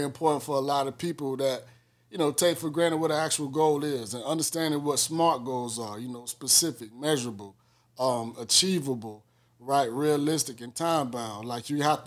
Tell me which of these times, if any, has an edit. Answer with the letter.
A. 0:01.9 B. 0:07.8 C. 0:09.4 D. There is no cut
D